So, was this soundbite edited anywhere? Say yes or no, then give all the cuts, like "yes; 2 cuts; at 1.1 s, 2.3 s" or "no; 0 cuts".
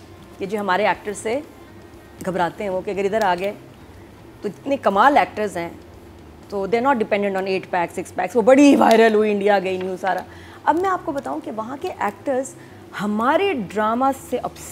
no; 0 cuts